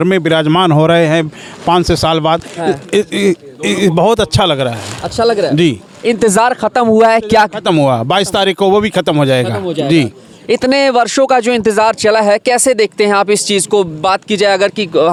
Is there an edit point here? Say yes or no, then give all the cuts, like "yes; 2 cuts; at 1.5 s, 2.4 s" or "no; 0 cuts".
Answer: no; 0 cuts